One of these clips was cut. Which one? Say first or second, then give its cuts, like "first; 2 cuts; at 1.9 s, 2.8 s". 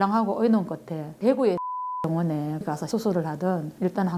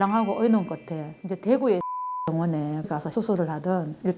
first; 1 cut; at 1.0 s